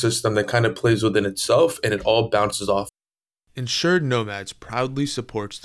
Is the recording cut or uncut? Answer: cut